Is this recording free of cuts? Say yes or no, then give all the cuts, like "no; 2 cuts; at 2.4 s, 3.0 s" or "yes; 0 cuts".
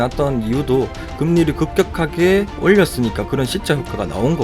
no; 1 cut; at 2.5 s